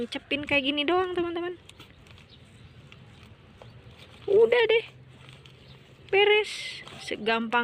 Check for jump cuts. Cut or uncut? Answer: uncut